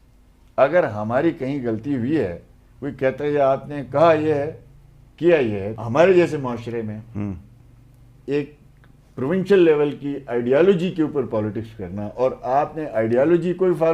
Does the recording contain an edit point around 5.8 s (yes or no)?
yes